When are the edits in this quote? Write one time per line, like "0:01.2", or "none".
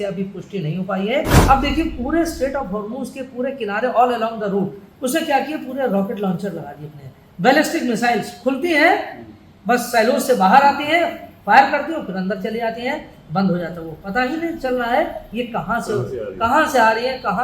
0:01.3